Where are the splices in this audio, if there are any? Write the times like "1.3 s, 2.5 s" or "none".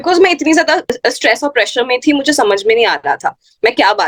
1.0 s